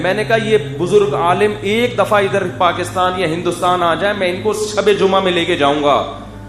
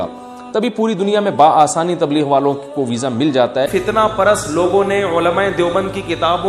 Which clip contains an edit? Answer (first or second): second